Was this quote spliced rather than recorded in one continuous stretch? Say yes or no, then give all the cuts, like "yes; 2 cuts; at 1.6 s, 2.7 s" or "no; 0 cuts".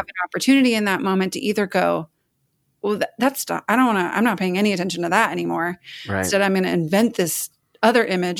yes; 1 cut; at 6.1 s